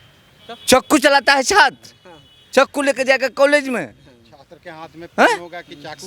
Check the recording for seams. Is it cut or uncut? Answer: uncut